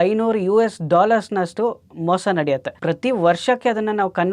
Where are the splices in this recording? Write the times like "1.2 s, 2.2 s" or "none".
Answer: 2.7 s